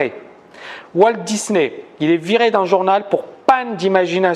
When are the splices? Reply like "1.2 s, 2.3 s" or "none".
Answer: 2.7 s